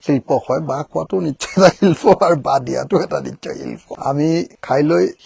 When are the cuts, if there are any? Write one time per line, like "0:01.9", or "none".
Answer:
0:03.9